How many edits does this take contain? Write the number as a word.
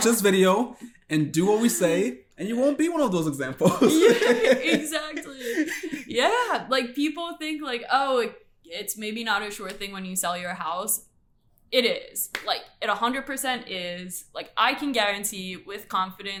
zero